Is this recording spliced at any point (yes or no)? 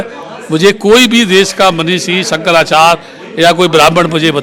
no